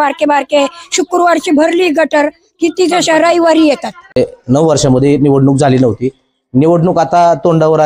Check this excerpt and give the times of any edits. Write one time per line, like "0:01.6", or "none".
0:04.2